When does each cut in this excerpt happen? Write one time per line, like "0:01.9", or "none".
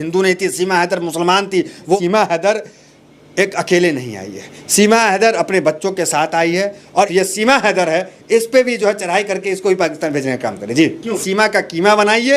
0:02.0
0:07.1
0:11.2